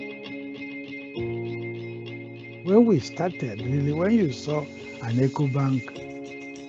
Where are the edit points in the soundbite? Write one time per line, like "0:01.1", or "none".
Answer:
0:01.1
0:03.8